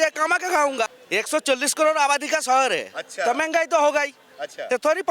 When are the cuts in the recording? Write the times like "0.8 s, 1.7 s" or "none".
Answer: 1.0 s

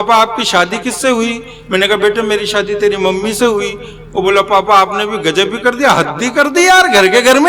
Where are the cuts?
none

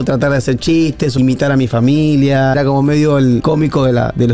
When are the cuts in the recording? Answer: 1.2 s, 2.5 s, 3.4 s

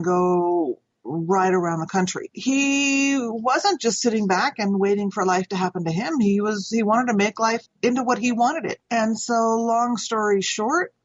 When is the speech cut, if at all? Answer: 2.3 s

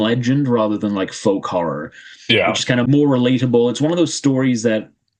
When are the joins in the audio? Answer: 2.9 s

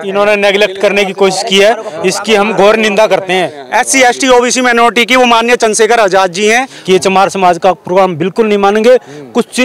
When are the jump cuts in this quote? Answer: 3.6 s, 6.7 s

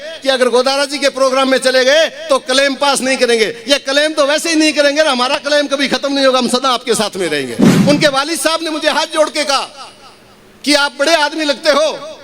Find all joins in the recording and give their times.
7.7 s

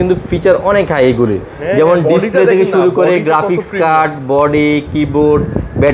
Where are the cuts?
none

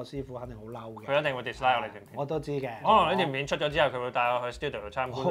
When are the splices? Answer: 2.7 s

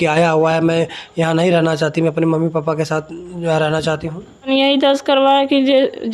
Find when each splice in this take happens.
4.5 s

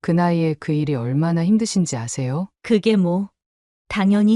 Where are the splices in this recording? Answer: 2.5 s

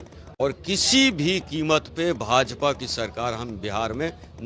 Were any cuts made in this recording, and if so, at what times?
none

